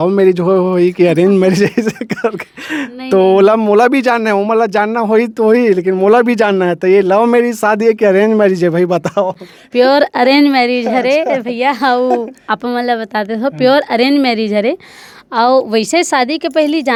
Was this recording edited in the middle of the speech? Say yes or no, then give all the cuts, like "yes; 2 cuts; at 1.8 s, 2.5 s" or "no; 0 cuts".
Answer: no; 0 cuts